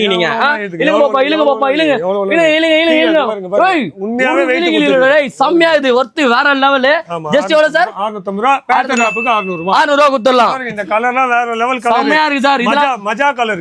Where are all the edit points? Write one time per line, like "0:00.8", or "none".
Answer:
none